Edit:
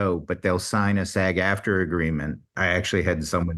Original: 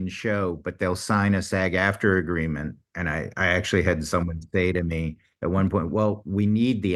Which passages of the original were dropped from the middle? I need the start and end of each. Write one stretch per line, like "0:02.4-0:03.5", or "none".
0:02.8-0:03.3